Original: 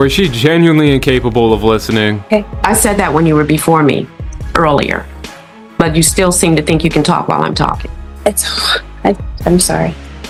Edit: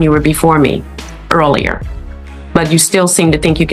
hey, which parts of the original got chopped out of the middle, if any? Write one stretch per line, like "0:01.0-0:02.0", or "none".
none